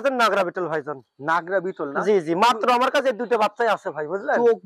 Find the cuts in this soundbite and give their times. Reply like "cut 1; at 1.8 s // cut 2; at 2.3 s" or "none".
none